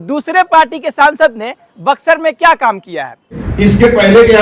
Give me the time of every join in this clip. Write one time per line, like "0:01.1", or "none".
0:03.3